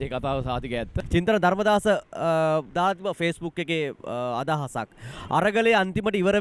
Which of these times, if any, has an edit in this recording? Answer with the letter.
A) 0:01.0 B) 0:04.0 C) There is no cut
A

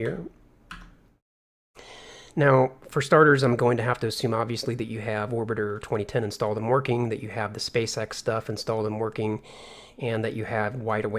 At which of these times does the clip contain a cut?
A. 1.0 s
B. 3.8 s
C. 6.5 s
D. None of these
C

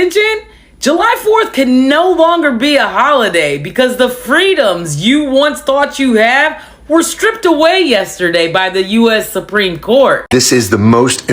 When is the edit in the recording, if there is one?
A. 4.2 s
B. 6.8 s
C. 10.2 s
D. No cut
C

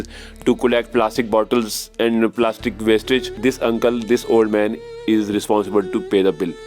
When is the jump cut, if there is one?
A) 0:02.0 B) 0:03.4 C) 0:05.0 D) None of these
B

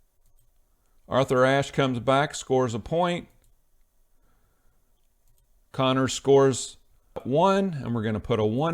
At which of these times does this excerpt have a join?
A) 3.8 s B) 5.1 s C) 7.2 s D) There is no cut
C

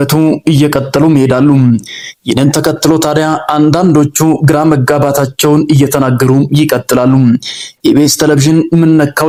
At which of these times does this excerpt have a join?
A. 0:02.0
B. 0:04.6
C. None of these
C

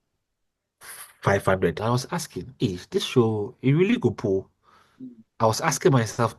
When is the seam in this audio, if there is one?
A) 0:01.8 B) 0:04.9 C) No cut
A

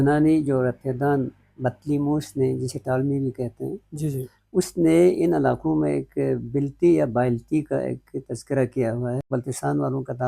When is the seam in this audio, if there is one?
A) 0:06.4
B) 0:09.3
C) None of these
B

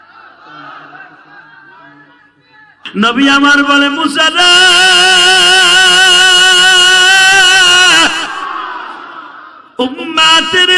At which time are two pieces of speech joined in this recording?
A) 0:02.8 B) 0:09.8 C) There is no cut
A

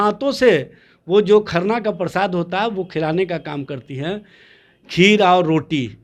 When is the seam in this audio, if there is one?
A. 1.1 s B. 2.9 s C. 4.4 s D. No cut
D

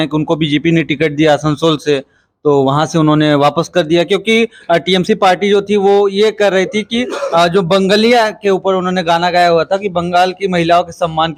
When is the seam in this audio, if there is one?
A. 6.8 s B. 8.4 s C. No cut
C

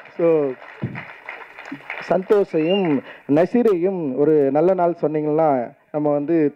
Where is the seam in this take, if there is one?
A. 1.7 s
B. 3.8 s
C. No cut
C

